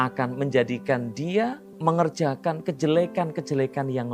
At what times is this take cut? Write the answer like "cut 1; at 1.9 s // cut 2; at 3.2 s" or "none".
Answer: cut 1; at 1.7 s